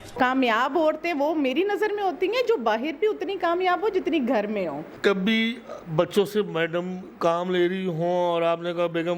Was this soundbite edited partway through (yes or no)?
no